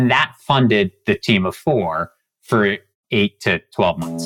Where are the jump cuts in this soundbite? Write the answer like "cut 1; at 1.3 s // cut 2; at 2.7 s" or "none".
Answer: cut 1; at 2.9 s